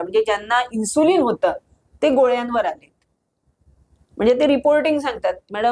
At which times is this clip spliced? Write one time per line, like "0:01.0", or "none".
none